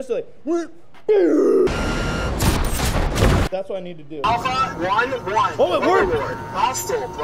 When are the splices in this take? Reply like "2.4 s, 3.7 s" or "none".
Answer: 1.7 s, 4.2 s